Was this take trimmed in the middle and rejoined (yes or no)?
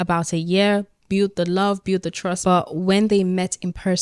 yes